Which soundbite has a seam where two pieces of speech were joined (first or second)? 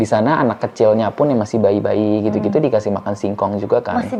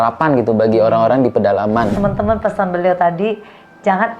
second